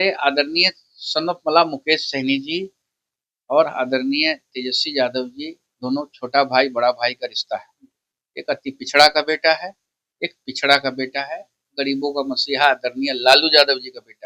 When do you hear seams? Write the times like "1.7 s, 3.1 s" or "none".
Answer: none

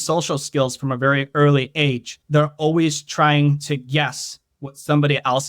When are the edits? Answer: 2.1 s

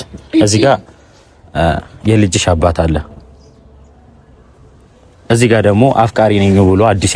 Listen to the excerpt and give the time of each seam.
none

